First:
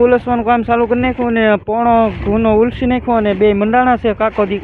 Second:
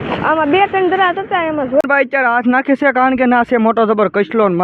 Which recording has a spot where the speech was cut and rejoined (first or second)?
second